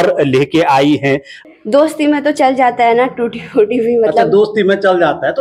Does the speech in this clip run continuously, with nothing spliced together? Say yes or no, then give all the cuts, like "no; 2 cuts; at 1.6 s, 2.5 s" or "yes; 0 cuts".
no; 1 cut; at 1.4 s